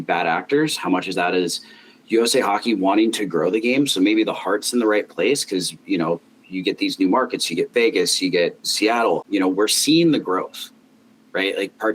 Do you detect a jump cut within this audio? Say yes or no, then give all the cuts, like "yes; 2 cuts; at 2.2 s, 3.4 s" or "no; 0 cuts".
no; 0 cuts